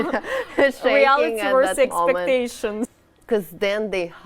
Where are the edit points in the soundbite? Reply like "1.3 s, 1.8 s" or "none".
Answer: 2.9 s